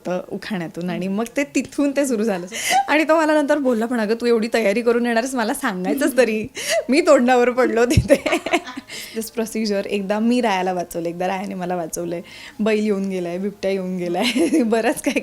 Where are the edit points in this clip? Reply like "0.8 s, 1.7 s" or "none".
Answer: 2.5 s, 9.2 s